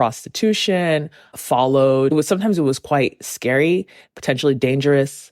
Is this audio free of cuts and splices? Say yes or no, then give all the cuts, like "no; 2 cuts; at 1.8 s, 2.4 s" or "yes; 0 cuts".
no; 1 cut; at 2.1 s